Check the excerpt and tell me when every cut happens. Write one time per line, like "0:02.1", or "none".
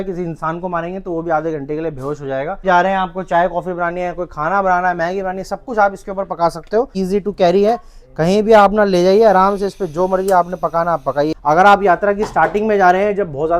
0:02.6
0:06.9
0:11.3